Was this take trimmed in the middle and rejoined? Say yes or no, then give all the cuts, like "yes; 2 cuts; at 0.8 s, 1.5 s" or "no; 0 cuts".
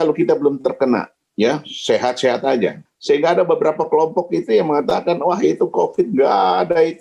yes; 2 cuts; at 1.2 s, 2.9 s